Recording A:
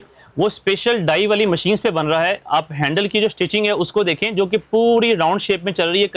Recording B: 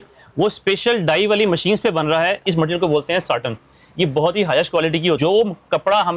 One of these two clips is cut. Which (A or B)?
B